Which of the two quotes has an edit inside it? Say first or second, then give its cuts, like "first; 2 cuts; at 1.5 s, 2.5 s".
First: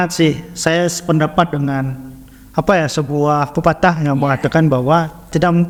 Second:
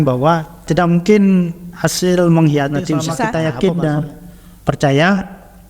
second; 1 cut; at 3.2 s